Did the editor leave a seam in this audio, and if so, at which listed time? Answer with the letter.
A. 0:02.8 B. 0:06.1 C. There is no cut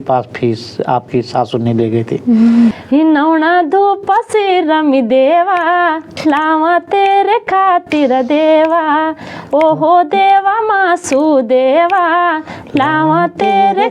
A